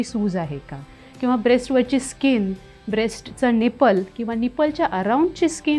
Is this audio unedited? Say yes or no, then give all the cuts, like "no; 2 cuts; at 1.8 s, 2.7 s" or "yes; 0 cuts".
yes; 0 cuts